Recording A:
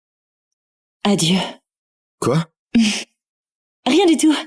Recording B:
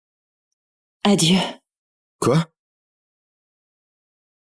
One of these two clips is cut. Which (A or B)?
A